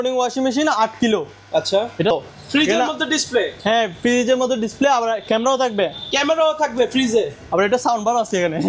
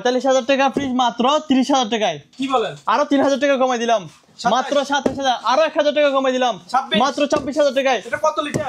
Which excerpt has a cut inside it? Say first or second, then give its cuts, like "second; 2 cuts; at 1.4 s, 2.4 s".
first; 1 cut; at 2.1 s